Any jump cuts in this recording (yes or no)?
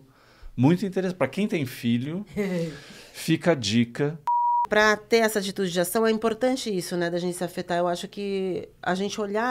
yes